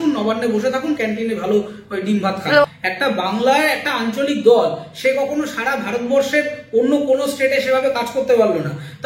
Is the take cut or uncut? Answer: cut